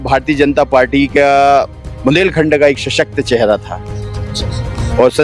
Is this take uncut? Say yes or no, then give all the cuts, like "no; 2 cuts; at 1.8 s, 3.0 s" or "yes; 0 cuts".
yes; 0 cuts